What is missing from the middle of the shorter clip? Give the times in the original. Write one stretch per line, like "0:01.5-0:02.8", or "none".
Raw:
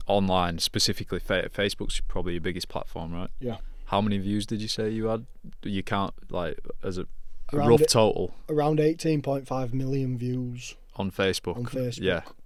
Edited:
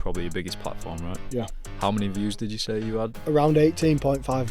0:05.3-0:08.4